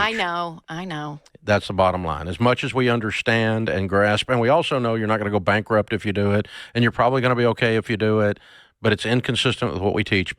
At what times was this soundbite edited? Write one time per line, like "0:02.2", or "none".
0:09.2

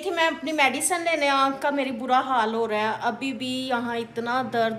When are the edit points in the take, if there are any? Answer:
none

